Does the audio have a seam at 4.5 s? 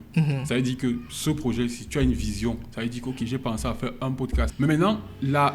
yes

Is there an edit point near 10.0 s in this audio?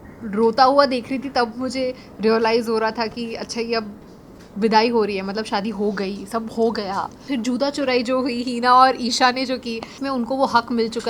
yes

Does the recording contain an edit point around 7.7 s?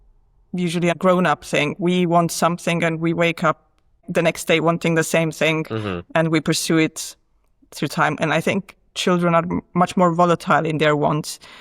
no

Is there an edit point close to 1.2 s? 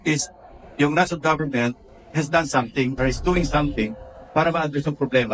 no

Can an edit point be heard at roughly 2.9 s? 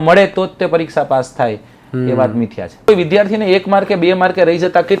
yes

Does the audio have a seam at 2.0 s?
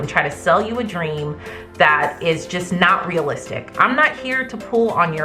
no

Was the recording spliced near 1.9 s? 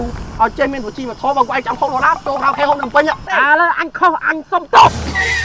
no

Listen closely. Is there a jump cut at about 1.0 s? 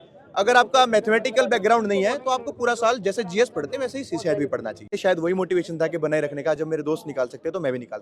no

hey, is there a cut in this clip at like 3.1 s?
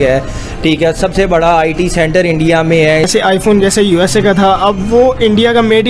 yes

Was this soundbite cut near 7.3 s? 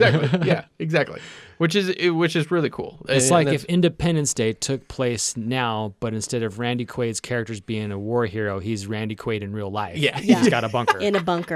no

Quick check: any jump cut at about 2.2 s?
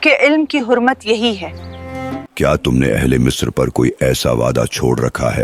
yes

